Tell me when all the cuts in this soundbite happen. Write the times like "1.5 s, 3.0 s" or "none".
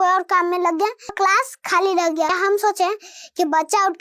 1.1 s, 2.4 s